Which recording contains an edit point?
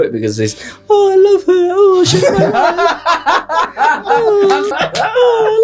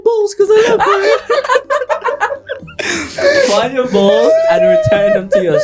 first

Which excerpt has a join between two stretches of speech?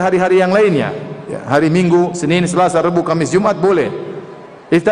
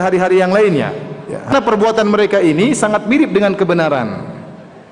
second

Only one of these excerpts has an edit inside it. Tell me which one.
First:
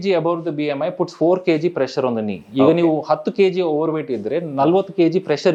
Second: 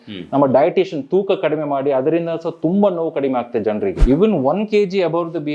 second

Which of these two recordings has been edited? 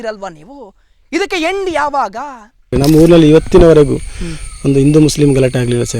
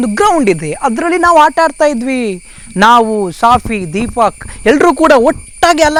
first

